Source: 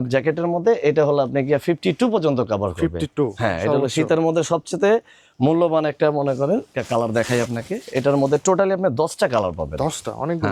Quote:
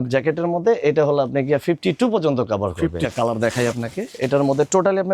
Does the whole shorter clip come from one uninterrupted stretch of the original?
no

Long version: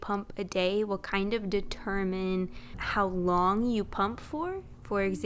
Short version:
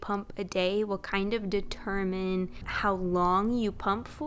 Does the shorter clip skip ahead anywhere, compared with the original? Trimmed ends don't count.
yes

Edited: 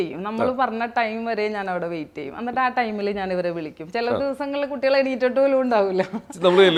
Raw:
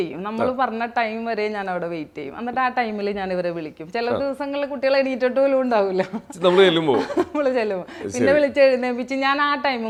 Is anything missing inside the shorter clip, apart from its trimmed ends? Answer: no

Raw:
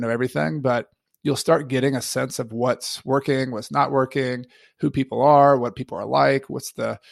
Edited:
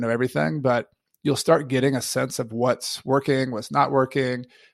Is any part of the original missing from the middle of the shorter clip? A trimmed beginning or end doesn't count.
no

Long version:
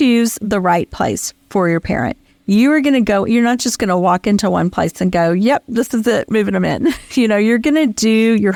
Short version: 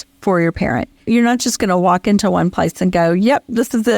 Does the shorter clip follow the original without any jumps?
no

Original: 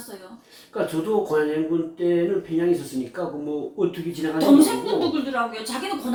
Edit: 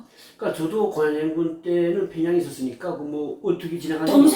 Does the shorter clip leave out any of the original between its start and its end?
no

